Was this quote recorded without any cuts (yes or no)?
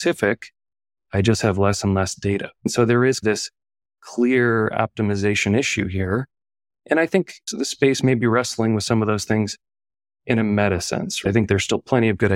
no